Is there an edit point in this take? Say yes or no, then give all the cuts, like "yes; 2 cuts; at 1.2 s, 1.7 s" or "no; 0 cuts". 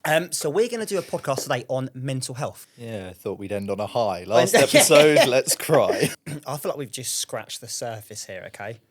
yes; 2 cuts; at 2.7 s, 6.1 s